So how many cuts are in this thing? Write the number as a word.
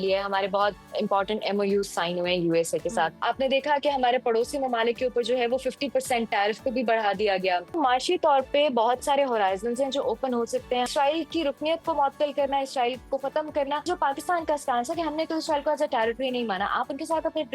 four